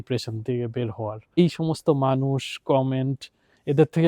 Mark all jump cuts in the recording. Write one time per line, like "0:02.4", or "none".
0:01.4